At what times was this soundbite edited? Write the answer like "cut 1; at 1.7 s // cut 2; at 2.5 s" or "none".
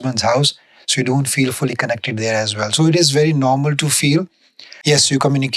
cut 1; at 4.6 s